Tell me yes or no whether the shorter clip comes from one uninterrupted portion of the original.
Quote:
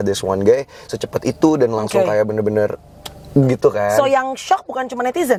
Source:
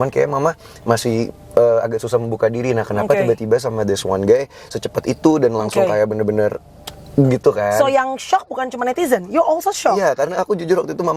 yes